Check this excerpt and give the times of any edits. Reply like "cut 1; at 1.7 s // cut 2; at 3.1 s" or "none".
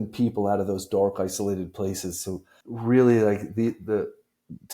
cut 1; at 2.6 s